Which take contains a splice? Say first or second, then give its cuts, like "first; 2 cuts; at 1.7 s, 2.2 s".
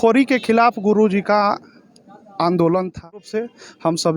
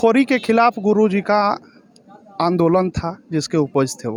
first; 1 cut; at 3.3 s